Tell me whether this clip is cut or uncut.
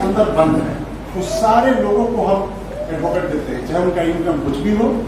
uncut